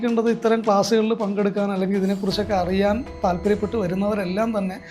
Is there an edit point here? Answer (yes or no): no